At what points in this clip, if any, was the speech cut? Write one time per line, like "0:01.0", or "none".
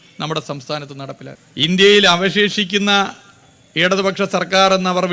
0:01.4

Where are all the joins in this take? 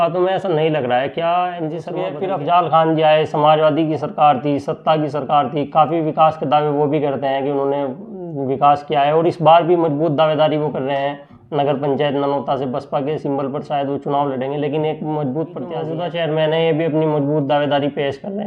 0:02.1
0:15.9

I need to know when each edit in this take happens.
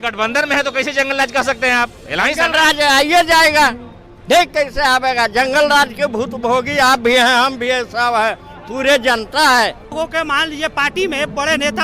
0:09.9

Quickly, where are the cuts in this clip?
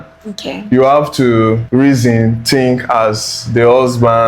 0:01.6

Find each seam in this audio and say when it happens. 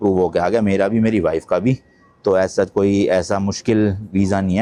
none

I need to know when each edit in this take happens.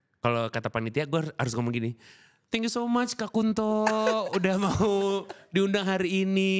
none

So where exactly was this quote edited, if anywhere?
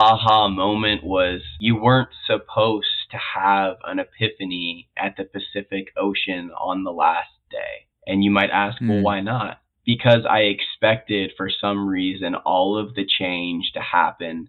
0:01.5

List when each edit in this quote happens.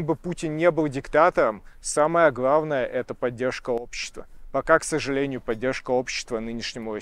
none

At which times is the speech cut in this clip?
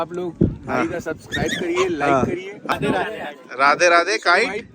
0:02.7

